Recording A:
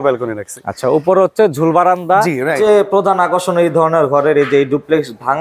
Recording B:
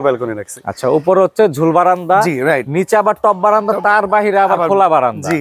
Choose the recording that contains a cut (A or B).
A